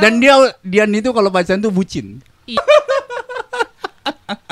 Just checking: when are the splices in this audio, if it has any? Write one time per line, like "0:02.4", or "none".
0:02.6